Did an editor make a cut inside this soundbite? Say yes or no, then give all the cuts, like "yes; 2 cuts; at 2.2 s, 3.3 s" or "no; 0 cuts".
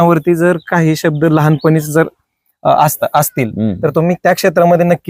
no; 0 cuts